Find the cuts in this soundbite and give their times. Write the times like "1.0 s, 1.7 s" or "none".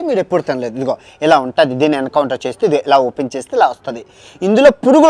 none